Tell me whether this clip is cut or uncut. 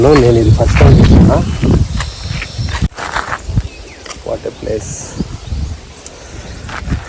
cut